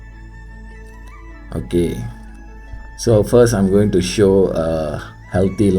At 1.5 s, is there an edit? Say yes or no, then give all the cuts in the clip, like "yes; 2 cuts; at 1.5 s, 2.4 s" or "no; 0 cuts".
yes; 1 cut; at 1.5 s